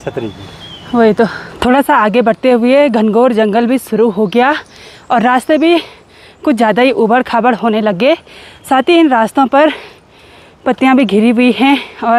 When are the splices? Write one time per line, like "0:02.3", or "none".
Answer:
none